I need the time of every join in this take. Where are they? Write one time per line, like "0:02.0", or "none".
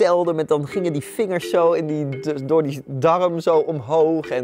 none